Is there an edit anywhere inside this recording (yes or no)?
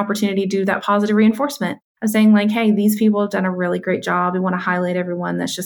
no